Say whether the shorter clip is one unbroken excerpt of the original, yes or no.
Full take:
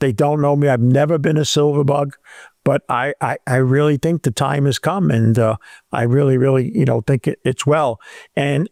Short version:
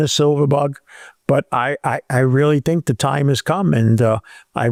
yes